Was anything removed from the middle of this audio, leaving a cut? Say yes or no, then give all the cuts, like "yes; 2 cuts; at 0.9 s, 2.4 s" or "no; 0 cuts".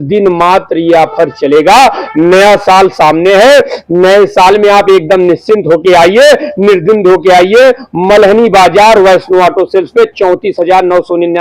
no; 0 cuts